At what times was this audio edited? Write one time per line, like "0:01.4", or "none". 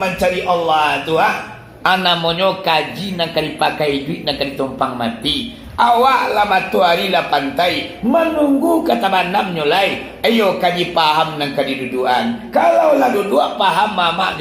none